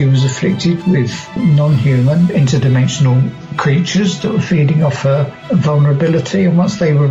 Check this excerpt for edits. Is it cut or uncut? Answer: cut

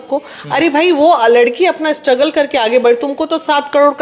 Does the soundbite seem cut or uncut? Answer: uncut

